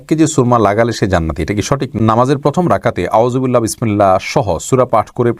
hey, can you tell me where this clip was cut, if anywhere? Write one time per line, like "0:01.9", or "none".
0:01.9